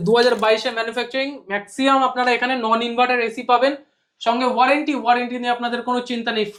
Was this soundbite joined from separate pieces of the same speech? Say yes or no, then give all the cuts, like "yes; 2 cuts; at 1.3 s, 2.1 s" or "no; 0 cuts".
no; 0 cuts